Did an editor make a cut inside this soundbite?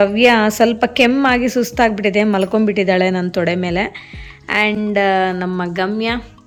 no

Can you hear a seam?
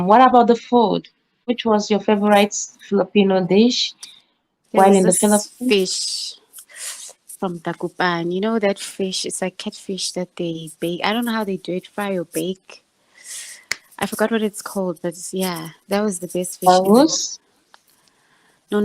yes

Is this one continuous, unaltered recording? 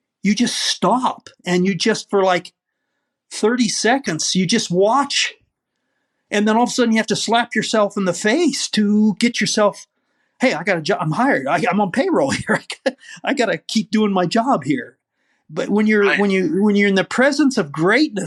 yes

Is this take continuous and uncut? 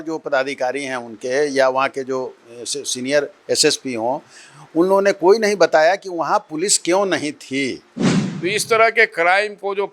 no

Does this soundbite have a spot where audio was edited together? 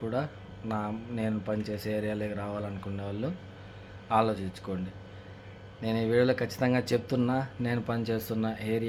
no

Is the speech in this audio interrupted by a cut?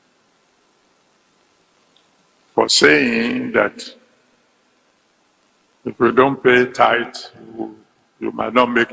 no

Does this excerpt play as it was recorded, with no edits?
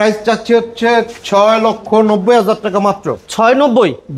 yes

